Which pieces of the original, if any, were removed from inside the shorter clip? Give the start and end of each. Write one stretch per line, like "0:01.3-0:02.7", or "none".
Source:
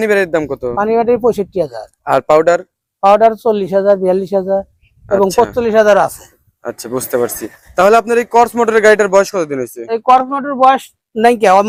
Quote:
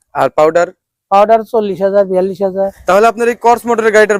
0:04.7-0:07.7